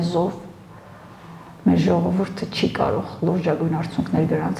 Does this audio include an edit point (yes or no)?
no